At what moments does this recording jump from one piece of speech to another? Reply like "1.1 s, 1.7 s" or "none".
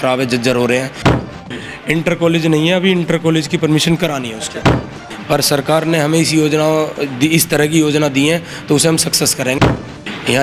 1.1 s, 4.9 s, 9.7 s